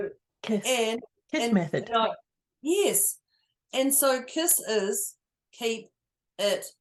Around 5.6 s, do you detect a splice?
no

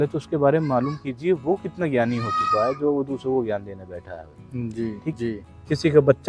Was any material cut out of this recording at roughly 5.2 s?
yes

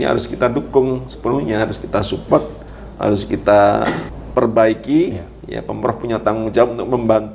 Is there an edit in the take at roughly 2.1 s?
no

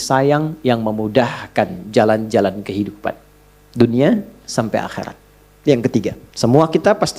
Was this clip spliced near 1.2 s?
no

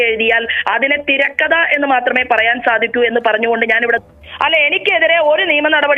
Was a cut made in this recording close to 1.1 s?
no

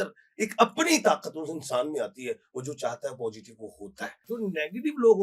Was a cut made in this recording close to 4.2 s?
yes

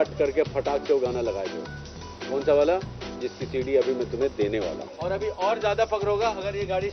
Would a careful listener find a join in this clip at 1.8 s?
no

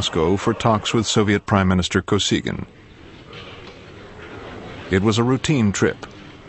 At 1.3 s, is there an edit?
no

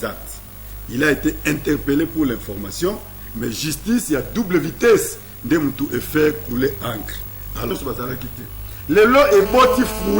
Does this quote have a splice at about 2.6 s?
no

